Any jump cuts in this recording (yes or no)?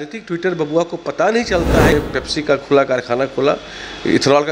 yes